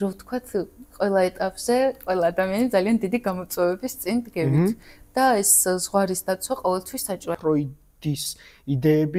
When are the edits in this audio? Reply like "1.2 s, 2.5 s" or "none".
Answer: 7.3 s